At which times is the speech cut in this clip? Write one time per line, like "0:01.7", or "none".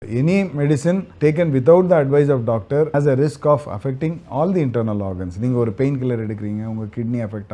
0:01.1
0:02.9